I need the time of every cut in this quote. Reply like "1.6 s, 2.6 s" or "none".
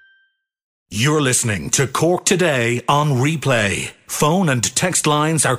0.9 s